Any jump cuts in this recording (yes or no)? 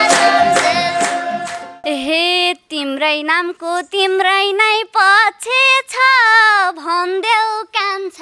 yes